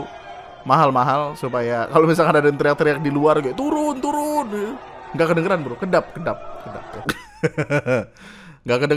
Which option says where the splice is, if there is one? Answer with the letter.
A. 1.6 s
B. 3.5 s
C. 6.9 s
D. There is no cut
C